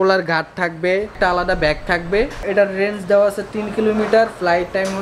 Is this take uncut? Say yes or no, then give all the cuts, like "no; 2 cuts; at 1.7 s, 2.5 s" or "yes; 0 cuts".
no; 2 cuts; at 1.1 s, 2.5 s